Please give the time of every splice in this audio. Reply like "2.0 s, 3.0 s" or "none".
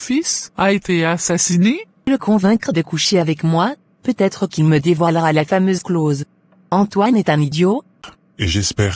2.1 s, 8.0 s